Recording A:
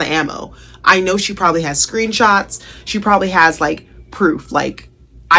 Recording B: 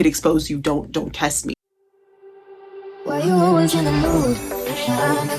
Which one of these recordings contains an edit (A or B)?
B